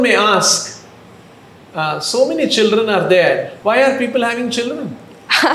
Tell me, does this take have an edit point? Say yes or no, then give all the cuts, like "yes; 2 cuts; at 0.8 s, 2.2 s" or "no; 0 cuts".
yes; 1 cut; at 3.5 s